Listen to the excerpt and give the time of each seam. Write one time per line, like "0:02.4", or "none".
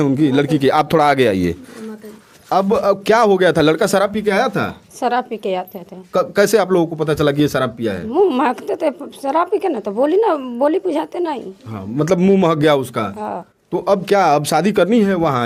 none